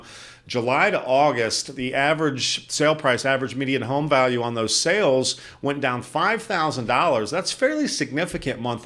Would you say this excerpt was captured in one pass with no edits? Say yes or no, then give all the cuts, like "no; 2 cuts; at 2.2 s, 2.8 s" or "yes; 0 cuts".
yes; 0 cuts